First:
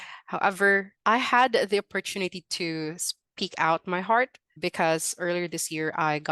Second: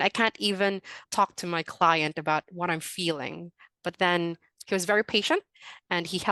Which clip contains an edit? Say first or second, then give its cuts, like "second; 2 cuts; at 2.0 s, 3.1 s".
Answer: first; 2 cuts; at 0.9 s, 4.4 s